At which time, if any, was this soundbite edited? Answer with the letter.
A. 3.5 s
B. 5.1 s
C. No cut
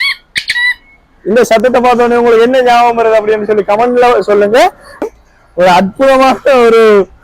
B